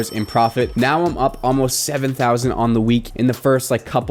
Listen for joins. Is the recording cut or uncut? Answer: uncut